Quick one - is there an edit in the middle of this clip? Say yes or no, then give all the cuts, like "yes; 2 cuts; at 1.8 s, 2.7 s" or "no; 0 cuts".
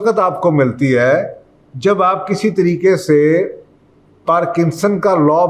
no; 0 cuts